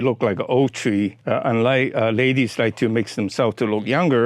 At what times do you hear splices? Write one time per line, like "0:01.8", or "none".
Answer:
0:01.2